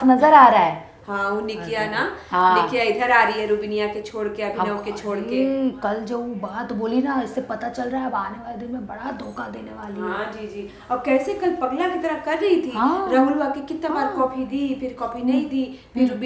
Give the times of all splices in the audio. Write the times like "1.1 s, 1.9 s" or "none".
none